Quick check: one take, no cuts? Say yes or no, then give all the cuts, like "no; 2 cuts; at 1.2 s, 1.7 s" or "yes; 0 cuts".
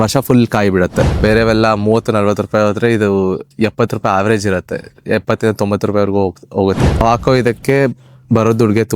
no; 2 cuts; at 1.1 s, 7.0 s